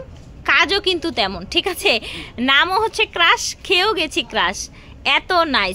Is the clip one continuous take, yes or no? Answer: yes